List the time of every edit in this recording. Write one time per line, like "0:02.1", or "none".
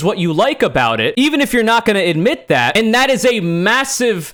none